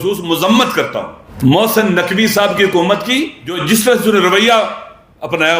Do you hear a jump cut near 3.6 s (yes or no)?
yes